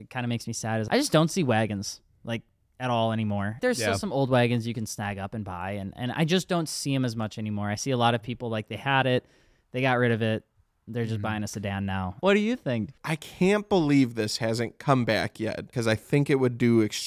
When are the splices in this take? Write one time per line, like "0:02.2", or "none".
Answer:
0:00.9
0:03.6
0:12.2
0:12.9
0:15.7